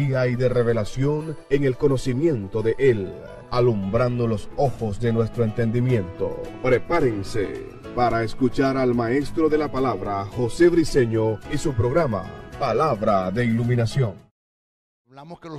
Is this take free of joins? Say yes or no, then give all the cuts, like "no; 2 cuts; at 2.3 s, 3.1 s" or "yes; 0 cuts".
yes; 0 cuts